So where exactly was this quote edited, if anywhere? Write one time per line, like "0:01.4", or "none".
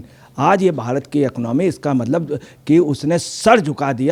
none